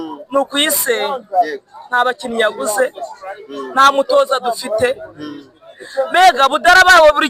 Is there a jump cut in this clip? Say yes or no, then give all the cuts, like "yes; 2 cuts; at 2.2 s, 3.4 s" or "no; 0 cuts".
no; 0 cuts